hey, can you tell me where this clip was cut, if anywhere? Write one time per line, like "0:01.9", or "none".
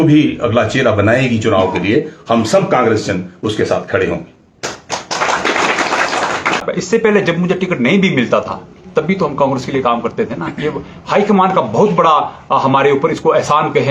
0:06.6